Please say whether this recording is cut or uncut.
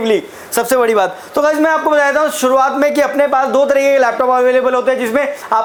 uncut